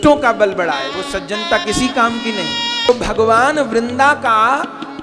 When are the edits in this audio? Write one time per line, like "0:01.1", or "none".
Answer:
0:02.9